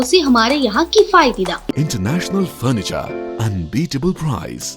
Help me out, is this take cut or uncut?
cut